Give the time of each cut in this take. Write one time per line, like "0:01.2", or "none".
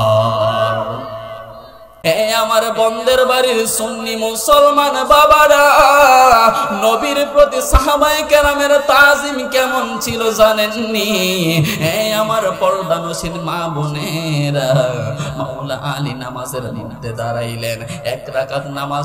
0:01.9